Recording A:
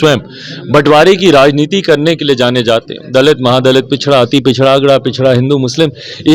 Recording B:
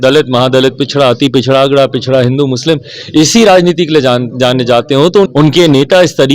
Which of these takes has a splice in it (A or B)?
B